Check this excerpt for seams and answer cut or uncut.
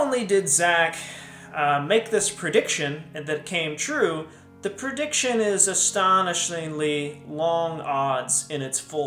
uncut